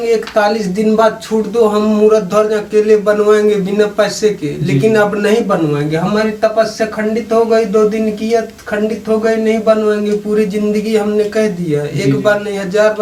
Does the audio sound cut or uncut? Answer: uncut